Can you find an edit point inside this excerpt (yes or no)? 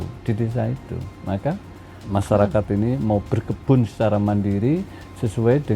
yes